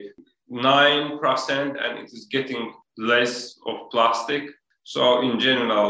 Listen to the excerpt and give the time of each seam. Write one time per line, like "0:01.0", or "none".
0:02.8